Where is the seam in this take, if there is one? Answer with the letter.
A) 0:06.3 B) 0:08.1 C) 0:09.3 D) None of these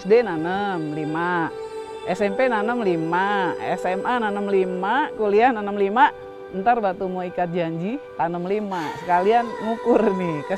B